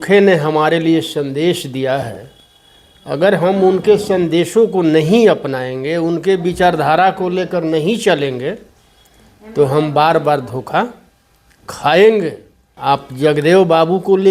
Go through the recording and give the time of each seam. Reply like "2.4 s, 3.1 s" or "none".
none